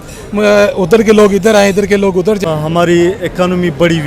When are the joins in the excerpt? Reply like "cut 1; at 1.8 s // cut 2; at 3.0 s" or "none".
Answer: cut 1; at 2.4 s